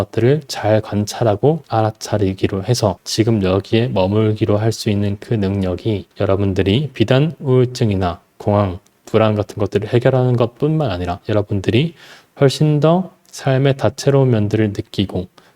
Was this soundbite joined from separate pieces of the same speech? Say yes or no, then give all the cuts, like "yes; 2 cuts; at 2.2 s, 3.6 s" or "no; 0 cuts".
yes; 1 cut; at 11.2 s